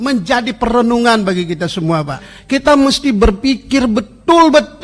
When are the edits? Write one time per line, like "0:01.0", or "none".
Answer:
0:02.3